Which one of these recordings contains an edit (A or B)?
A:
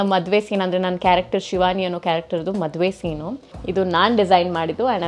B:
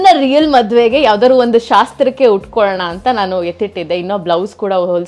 A